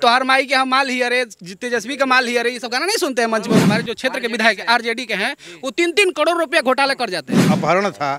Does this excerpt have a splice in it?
yes; 2 cuts; at 3.6 s, 7.5 s

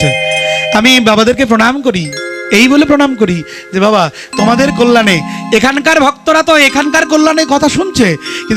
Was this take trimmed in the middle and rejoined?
no; 0 cuts

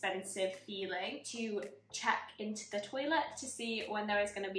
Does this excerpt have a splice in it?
yes; 1 cut; at 1.2 s

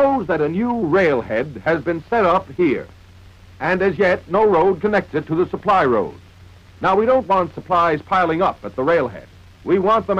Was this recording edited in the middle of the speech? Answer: no; 0 cuts

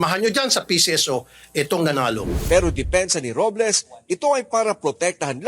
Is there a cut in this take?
yes; 1 cut; at 2.3 s

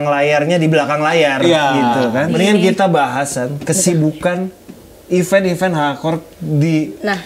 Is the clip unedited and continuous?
no; 1 cut; at 2.3 s

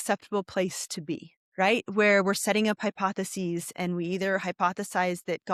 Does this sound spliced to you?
no; 0 cuts

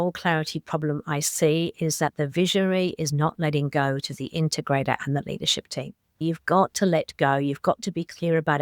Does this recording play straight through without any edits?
no; 1 cut; at 6.2 s

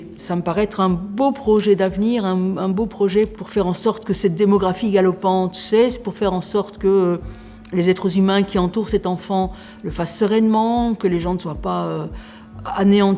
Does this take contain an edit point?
no; 0 cuts

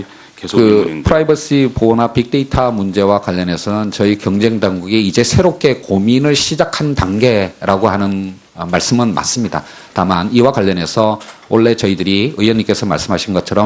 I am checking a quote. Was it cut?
no; 0 cuts

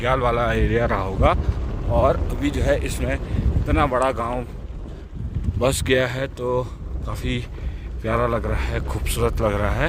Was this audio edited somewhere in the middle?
no; 0 cuts

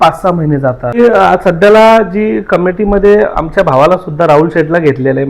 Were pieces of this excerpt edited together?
yes; 1 cut; at 1.0 s

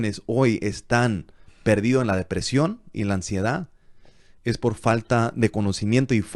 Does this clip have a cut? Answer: no; 0 cuts

